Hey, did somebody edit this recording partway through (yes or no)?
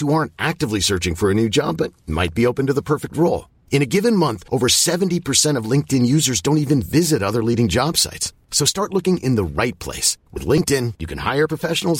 no